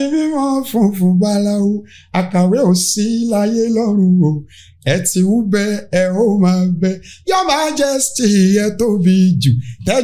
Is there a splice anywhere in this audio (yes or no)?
no